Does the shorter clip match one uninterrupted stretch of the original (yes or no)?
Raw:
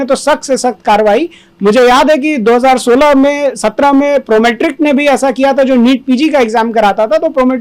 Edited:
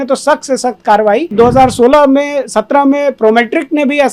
no